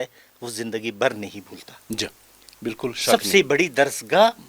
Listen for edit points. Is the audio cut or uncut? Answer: uncut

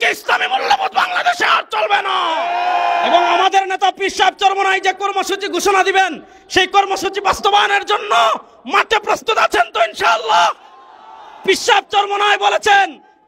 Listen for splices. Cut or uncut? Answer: cut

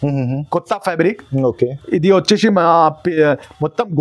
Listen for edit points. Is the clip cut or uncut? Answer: uncut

